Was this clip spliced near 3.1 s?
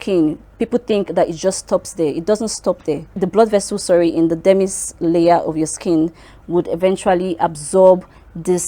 yes; 1 cut; at 3.1 s

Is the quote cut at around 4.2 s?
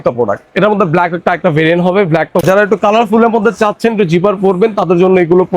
no; 1 cut; at 2.4 s

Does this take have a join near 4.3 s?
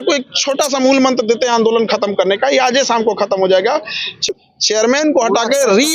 yes; 1 cut; at 4.3 s

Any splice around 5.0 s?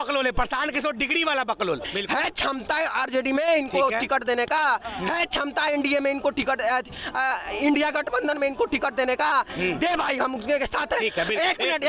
no; 1 cut; at 1.9 s

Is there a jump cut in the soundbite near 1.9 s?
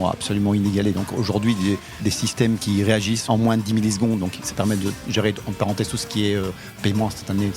yes; 1 cut; at 1.9 s

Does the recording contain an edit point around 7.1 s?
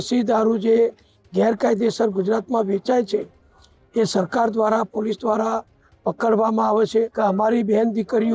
yes; 1 cut; at 7.1 s

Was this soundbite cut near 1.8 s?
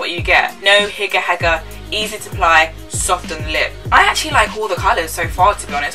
no; 1 cut; at 3.8 s

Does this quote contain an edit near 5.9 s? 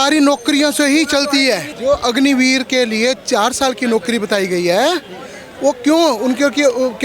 no; 1 cut; at 1.7 s

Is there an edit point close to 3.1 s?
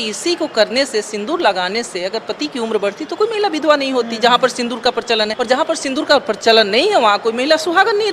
no; 1 cut; at 5.3 s

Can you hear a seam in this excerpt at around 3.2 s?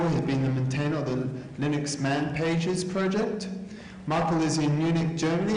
no; 0 cuts

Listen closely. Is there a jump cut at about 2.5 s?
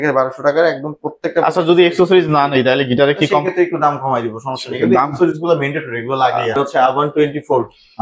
no; 1 cut; at 6.5 s

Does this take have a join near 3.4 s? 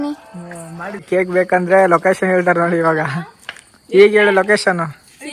no; 1 cut; at 1.0 s

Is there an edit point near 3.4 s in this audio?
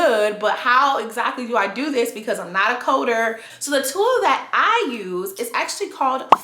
yes; 1 cut; at 3.4 s

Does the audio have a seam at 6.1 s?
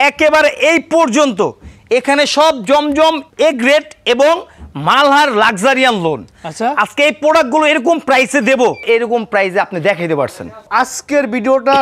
no; 3 cuts; at 3.3 s, 8.8 s, 10.6 s

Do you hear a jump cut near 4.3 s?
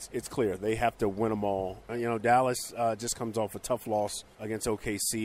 yes; 2 cuts; at 1.8 s, 4.3 s

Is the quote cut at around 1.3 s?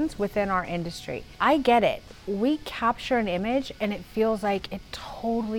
yes; 1 cut; at 1.3 s

